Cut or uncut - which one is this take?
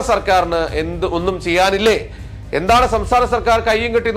uncut